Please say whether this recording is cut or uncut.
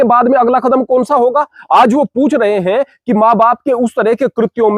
uncut